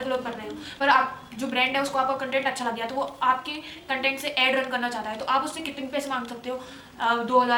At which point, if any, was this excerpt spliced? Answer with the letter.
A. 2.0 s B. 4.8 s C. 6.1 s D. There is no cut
D